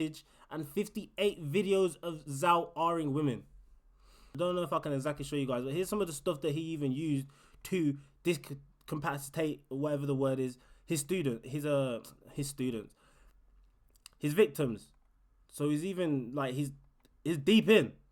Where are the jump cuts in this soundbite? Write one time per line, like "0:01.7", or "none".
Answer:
0:04.2